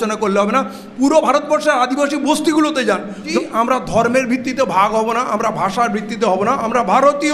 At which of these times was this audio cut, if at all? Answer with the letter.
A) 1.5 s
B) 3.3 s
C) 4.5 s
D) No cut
B